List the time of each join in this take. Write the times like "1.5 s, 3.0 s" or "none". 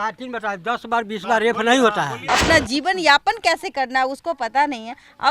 2.2 s